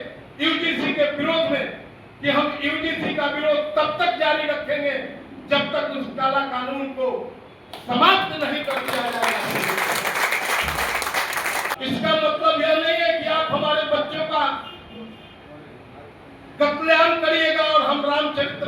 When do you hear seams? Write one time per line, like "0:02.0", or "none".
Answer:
0:11.7